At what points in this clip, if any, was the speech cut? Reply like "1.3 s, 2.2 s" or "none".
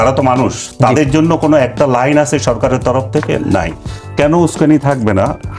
4.0 s